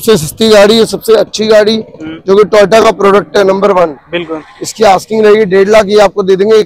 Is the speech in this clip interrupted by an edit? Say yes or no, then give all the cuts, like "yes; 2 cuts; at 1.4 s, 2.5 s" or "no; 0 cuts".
no; 0 cuts